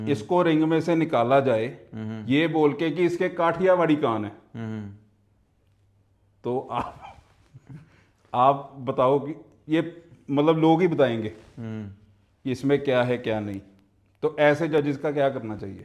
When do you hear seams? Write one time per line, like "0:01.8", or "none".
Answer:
none